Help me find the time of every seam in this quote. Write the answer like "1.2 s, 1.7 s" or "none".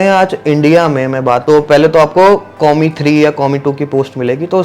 1.4 s